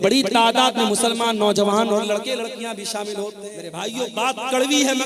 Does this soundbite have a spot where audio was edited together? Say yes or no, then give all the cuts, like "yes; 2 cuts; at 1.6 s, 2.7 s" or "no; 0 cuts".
yes; 1 cut; at 3.8 s